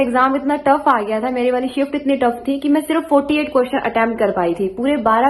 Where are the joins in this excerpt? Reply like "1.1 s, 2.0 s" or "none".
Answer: none